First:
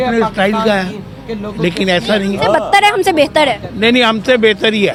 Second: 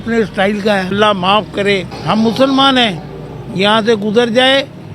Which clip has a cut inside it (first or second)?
second